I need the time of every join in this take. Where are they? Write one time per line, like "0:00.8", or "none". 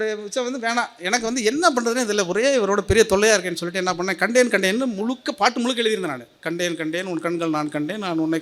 none